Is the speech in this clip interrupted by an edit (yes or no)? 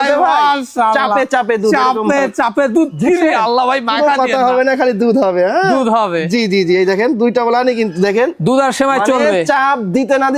no